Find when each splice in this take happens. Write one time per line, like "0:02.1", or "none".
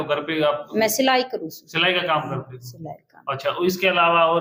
none